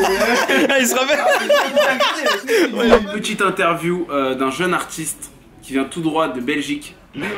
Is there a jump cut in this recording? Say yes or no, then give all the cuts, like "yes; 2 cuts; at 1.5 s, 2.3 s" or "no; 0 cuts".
yes; 1 cut; at 3.1 s